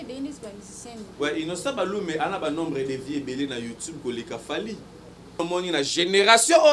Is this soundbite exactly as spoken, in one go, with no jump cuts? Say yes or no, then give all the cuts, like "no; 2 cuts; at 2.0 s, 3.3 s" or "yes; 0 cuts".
no; 1 cut; at 5.4 s